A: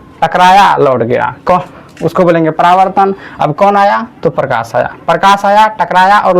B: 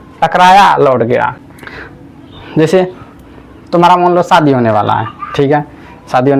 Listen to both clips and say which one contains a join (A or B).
B